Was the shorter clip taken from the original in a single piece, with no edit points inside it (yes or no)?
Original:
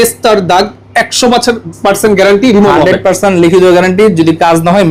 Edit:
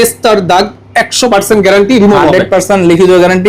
no